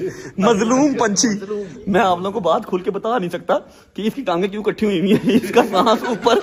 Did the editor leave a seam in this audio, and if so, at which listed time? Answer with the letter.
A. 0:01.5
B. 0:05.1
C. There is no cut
C